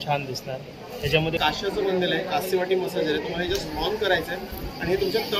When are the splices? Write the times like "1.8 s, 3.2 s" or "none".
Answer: 1.4 s